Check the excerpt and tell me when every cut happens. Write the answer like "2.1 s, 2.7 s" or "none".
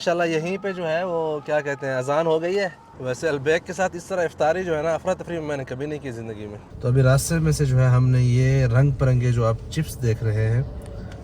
2.9 s, 6.7 s